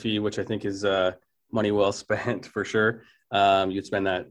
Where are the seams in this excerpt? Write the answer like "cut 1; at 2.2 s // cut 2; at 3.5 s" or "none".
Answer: none